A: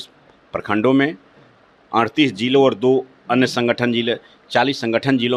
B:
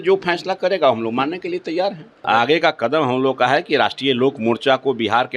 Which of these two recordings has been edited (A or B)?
B